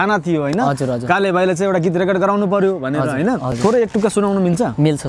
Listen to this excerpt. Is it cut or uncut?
cut